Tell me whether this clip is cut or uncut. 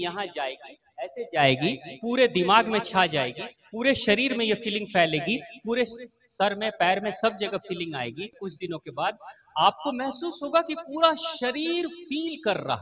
cut